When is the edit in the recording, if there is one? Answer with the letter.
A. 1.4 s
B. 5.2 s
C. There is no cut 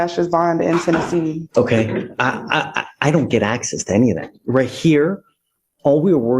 A